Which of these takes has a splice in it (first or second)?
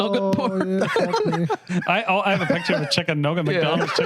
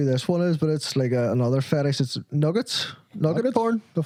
first